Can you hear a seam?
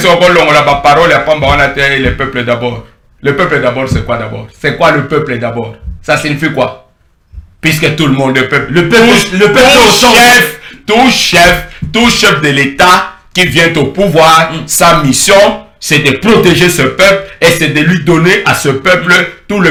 no; 0 cuts

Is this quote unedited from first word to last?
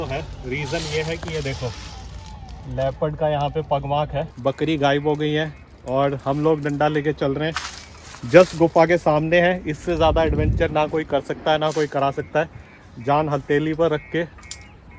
no; 1 cut; at 4.3 s

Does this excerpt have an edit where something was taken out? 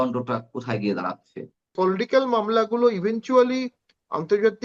yes; 1 cut; at 1.7 s

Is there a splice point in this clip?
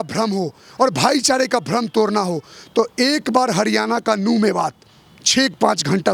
no; 0 cuts

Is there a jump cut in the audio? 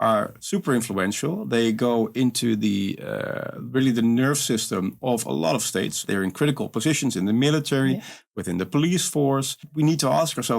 yes; 3 cuts; at 1.5 s, 6.0 s, 9.6 s

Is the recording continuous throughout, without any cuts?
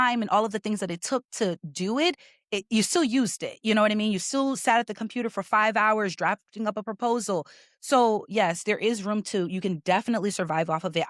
yes; 0 cuts

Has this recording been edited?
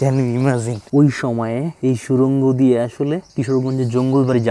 yes; 3 cuts; at 0.8 s, 1.7 s, 3.3 s

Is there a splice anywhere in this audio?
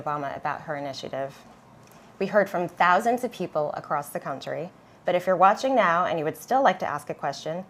no; 0 cuts

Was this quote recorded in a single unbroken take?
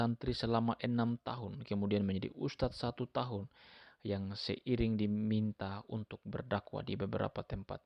yes; 0 cuts

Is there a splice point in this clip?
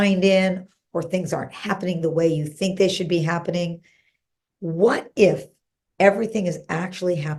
no; 0 cuts

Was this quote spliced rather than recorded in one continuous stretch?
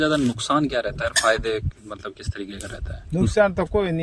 no; 0 cuts

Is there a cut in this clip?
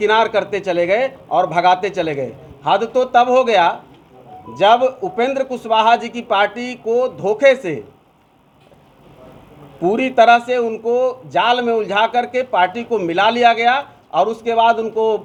no; 0 cuts

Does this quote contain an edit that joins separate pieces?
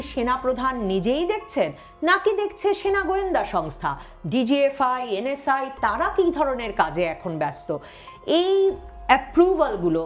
no; 0 cuts

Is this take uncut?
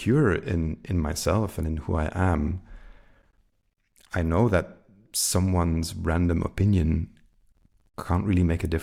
yes; 0 cuts

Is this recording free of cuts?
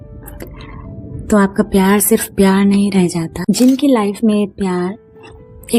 no; 1 cut; at 3.3 s

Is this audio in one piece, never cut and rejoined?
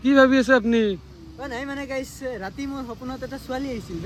yes; 0 cuts

